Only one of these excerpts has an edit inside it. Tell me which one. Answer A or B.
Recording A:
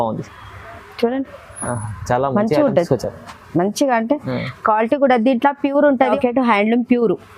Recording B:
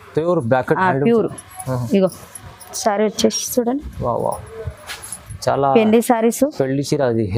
A